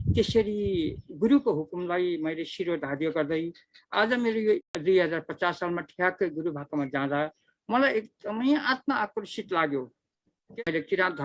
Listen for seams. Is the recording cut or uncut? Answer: cut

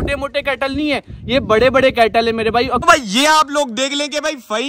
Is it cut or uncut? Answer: cut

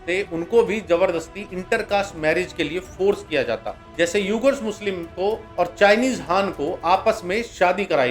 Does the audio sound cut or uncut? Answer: uncut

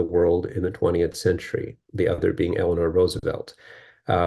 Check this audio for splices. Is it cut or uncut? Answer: uncut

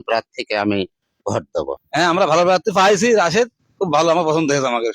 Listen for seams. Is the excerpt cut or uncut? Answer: cut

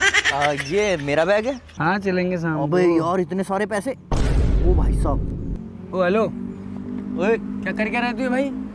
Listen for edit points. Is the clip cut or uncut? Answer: cut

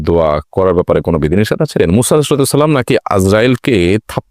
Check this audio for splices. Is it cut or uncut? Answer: cut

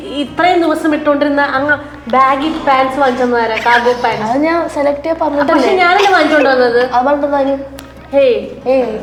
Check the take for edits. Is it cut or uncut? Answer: uncut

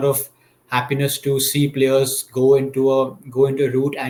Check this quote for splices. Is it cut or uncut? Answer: uncut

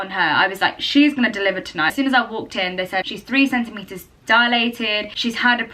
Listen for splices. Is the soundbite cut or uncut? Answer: uncut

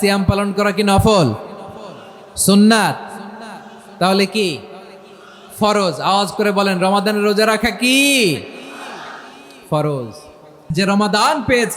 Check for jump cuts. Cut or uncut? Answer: cut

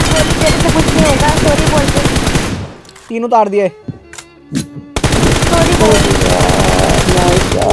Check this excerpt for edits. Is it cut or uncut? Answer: uncut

